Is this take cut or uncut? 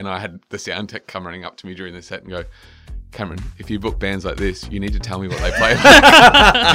uncut